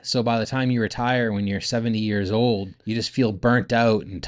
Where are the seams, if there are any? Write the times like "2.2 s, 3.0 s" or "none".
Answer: 2.7 s